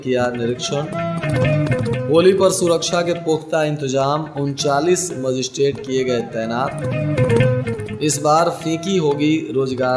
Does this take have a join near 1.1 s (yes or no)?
no